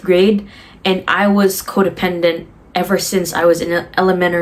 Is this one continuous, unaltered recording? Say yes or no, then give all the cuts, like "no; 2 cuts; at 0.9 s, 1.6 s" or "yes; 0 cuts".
yes; 0 cuts